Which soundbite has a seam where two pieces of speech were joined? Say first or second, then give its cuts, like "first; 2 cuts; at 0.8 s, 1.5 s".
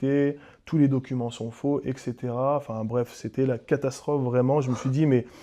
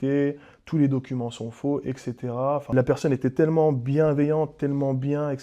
second; 1 cut; at 2.6 s